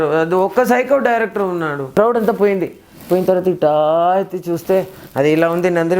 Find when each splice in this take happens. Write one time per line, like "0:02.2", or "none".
0:01.9